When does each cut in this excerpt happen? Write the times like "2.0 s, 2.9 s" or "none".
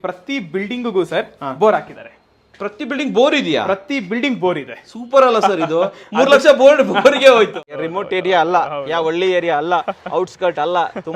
7.6 s